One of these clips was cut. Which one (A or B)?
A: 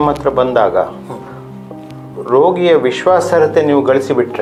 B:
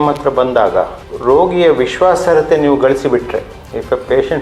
B